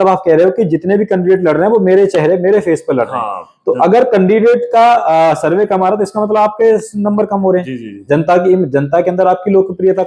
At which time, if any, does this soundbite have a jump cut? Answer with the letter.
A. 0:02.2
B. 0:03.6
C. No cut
C